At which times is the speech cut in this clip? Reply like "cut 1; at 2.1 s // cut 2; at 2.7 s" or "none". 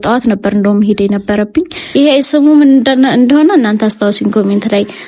cut 1; at 1.8 s

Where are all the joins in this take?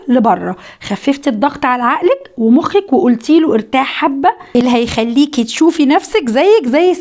cut 1; at 4.4 s

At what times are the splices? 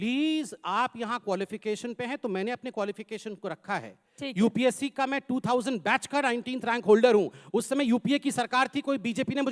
none

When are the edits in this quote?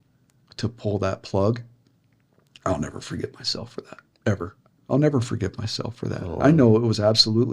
cut 1; at 4.8 s

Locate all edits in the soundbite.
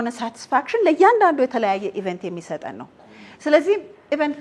none

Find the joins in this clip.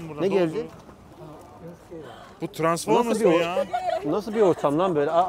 none

